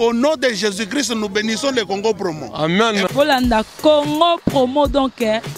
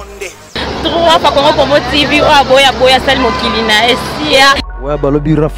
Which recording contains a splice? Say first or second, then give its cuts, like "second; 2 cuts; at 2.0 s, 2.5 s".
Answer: second; 1 cut; at 4.6 s